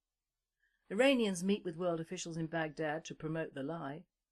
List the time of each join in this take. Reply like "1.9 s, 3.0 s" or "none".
none